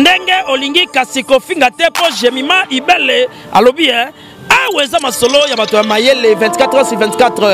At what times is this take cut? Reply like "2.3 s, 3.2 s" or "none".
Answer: none

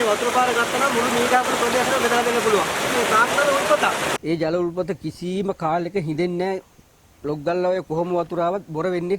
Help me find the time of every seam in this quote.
2.9 s, 4.1 s

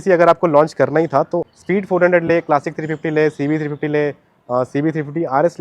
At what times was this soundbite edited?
1.5 s

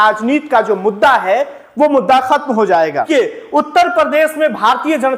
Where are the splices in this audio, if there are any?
3.1 s

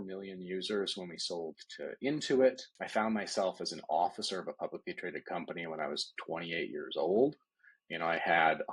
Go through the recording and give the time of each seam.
2.7 s

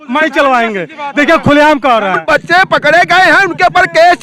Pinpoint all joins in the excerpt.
2.2 s

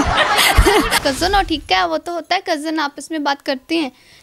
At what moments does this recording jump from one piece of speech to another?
0.9 s

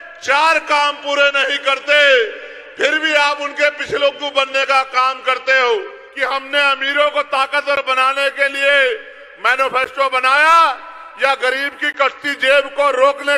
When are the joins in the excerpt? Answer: 6.0 s

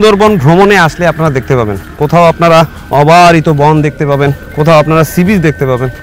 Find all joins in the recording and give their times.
2.8 s, 4.5 s

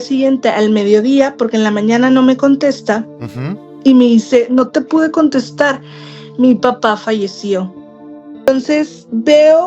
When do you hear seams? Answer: 8.5 s

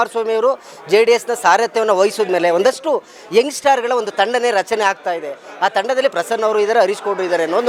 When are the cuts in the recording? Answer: none

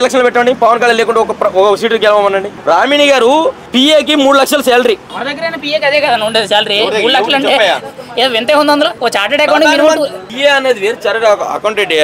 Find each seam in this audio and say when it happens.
2.5 s, 3.6 s, 5.1 s, 8.9 s, 10.2 s

